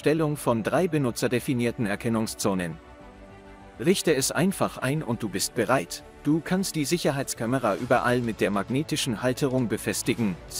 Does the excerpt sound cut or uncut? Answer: uncut